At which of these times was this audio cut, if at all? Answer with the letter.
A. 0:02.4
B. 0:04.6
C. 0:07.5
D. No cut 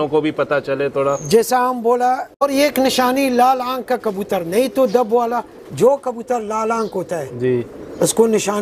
A